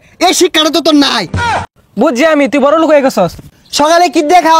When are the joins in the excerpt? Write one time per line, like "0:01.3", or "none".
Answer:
0:01.7
0:03.4